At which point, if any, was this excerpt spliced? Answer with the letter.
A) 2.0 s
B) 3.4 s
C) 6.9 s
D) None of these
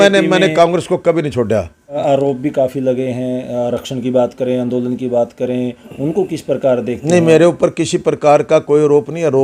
A